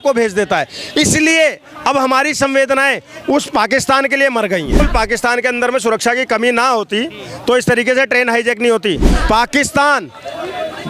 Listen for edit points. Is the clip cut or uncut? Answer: cut